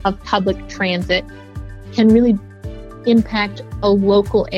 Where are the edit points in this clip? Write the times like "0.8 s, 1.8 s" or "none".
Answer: none